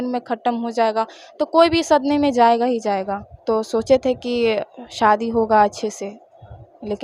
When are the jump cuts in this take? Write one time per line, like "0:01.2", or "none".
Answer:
0:03.4